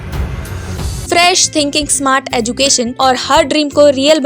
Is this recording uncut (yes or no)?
no